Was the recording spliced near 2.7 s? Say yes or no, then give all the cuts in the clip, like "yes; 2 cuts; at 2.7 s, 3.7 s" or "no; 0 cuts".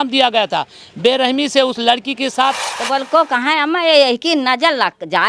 yes; 1 cut; at 2.7 s